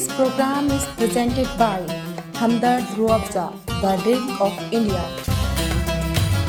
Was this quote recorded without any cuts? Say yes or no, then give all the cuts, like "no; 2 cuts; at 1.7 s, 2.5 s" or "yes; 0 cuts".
yes; 0 cuts